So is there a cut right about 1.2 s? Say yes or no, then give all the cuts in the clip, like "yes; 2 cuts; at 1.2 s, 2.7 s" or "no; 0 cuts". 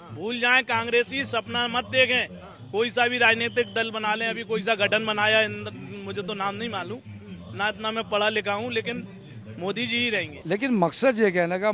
no; 1 cut; at 10.3 s